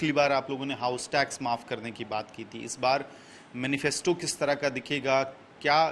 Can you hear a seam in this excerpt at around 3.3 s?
no; 0 cuts

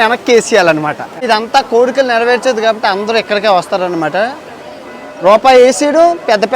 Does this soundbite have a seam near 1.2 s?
yes; 1 cut; at 1.2 s

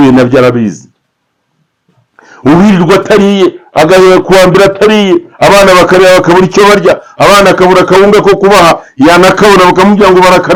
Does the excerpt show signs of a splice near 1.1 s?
no; 0 cuts

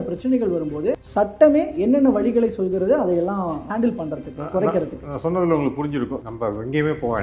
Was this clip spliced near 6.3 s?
yes; 1 cut; at 6.3 s

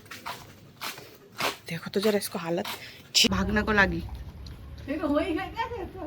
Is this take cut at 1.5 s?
no; 1 cut; at 3.3 s

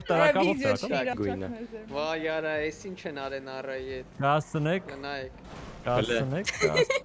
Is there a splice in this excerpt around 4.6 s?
no; 1 cut; at 1.1 s

